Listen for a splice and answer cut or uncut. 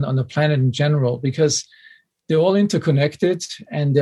uncut